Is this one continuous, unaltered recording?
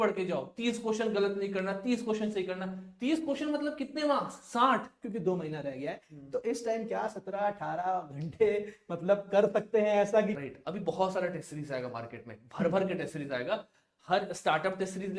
no; 2 cuts; at 5.1 s, 10.4 s

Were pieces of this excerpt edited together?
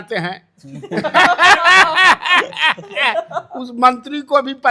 no; 0 cuts

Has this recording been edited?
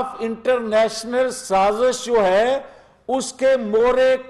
no; 0 cuts

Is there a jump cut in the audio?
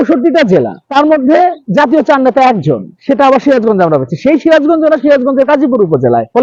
no; 0 cuts

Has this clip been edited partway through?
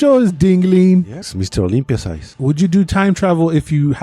yes; 2 cuts; at 1.2 s, 2.3 s

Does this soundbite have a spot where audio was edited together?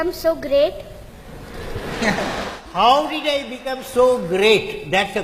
no; 0 cuts

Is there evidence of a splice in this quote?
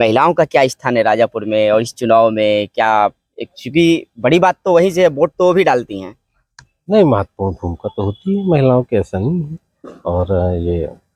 no; 0 cuts

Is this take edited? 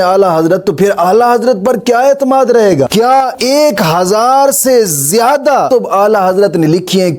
no; 0 cuts

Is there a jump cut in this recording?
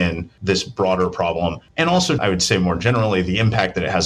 yes; 1 cut; at 2.2 s

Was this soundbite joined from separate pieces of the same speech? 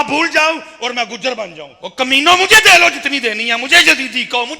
yes; 1 cut; at 1.7 s

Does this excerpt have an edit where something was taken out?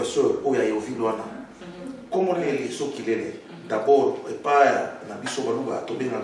yes; 1 cut; at 2.6 s

